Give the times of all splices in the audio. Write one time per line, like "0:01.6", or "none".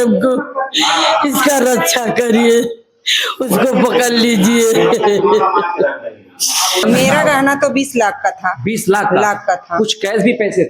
0:06.8